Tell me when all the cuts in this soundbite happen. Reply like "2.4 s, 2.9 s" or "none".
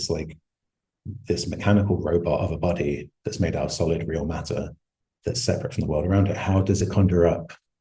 6.8 s

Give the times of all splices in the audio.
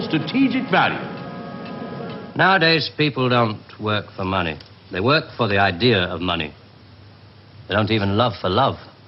2.2 s

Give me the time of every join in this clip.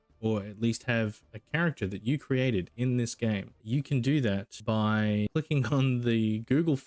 3.5 s, 4.5 s, 5.3 s

